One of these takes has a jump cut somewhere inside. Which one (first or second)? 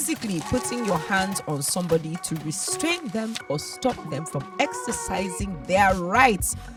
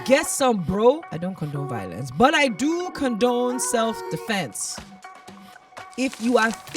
second